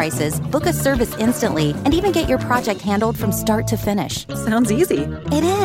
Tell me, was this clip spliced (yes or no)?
no